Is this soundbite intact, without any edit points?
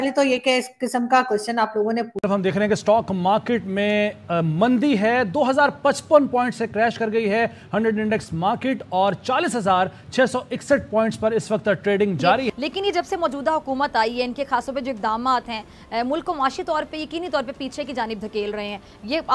no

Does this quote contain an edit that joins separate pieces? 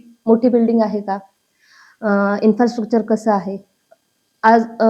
no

